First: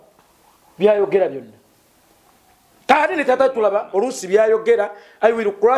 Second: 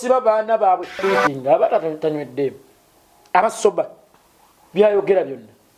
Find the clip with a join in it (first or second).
second